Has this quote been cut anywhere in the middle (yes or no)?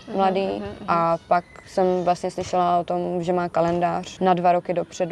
yes